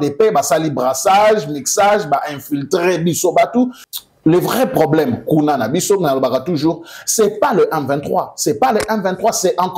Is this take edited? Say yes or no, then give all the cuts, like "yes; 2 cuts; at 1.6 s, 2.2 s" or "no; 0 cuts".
yes; 1 cut; at 3.8 s